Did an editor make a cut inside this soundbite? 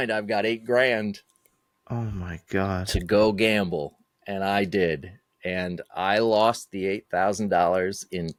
no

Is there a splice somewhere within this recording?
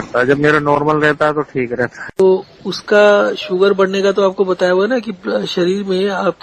yes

